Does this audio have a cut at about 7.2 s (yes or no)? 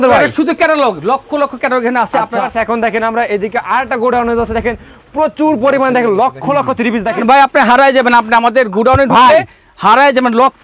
yes